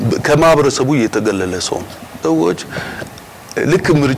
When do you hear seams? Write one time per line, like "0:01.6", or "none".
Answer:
0:02.2